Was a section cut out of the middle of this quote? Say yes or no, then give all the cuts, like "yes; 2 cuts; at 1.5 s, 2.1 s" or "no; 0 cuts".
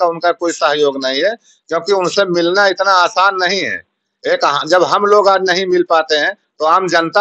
no; 0 cuts